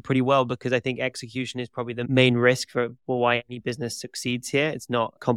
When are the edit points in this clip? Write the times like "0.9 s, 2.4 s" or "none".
none